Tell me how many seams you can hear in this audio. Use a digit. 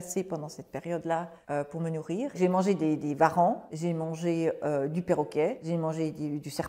1